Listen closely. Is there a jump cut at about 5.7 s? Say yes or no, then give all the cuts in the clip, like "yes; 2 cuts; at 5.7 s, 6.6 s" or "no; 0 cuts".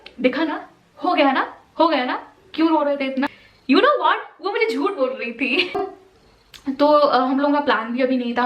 yes; 2 cuts; at 3.5 s, 5.7 s